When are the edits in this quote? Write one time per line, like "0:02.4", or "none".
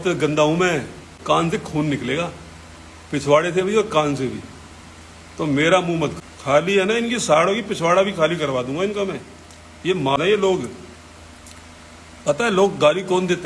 0:01.1
0:06.2
0:10.2